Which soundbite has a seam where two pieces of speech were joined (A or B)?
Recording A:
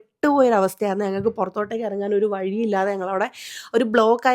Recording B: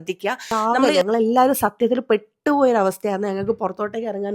B